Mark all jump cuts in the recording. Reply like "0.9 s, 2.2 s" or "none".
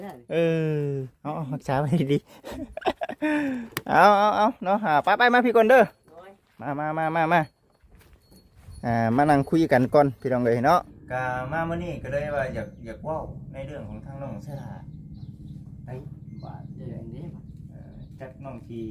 11.0 s

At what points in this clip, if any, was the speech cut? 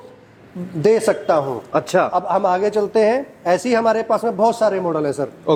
none

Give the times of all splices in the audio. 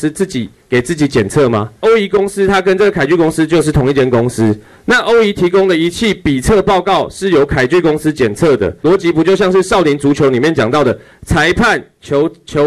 1.8 s, 8.7 s

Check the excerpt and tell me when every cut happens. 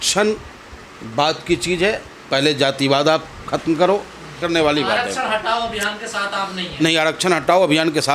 4.4 s

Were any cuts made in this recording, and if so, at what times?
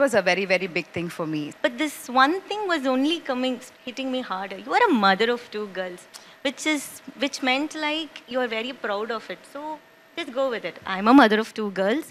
1.5 s

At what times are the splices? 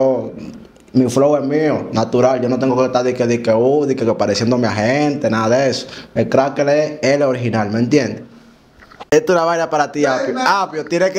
9.0 s

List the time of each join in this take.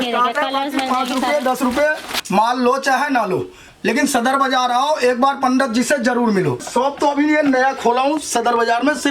2.3 s, 6.6 s

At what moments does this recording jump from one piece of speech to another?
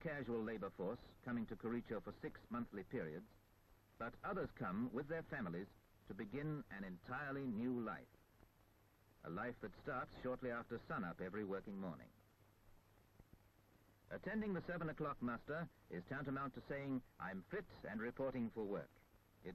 none

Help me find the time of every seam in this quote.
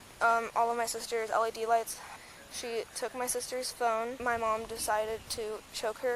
2.1 s, 4.2 s

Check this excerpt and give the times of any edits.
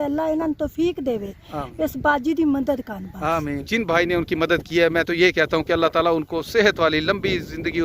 3.6 s

